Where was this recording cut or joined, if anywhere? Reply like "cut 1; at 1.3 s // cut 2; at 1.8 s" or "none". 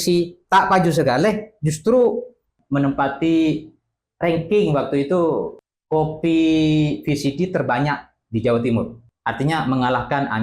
cut 1; at 2.5 s // cut 2; at 5.6 s // cut 3; at 9.0 s